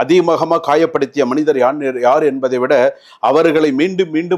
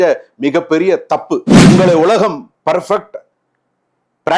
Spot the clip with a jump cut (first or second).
second